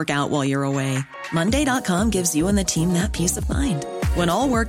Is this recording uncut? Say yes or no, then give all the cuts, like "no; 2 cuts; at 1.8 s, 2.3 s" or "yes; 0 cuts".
yes; 0 cuts